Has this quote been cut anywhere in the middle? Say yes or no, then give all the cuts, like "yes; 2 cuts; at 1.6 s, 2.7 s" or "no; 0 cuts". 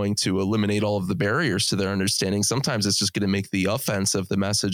no; 0 cuts